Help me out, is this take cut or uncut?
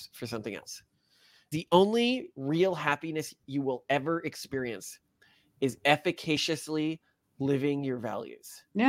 cut